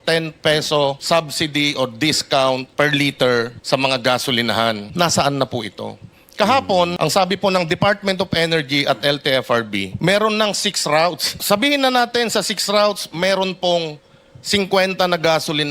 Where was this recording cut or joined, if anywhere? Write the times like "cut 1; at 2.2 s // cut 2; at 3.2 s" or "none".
cut 1; at 1.0 s // cut 2; at 2.7 s // cut 3; at 3.6 s // cut 4; at 4.9 s // cut 5; at 6.9 s // cut 6; at 9.9 s // cut 7; at 11.3 s